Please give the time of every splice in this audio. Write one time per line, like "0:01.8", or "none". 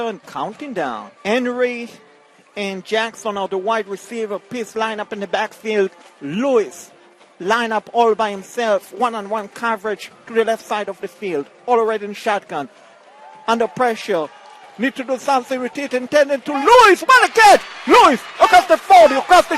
0:01.1